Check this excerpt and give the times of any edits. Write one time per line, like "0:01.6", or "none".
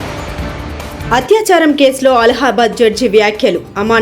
0:01.0